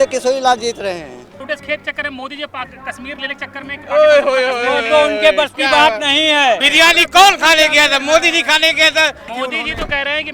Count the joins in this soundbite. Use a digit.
3